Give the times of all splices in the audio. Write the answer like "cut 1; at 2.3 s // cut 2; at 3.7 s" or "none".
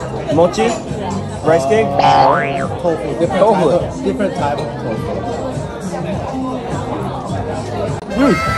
none